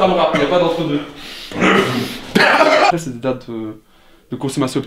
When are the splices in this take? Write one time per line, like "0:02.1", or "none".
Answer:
0:02.9